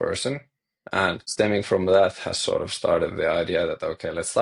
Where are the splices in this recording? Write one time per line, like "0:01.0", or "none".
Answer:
0:01.2

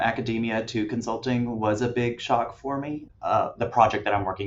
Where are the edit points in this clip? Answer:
0:03.1

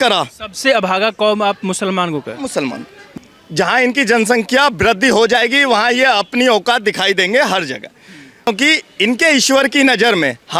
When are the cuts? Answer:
0:03.0
0:08.5

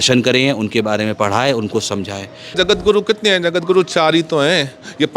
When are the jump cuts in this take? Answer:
0:02.5

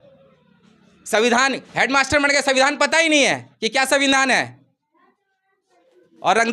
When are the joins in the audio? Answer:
none

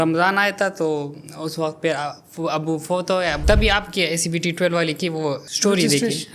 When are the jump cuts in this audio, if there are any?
0:03.4
0:05.4

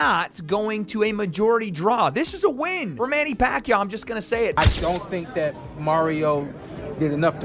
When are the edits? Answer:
0:04.5

